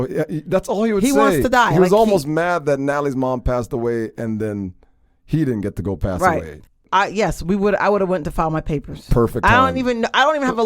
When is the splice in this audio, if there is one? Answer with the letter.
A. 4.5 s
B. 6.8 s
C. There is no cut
B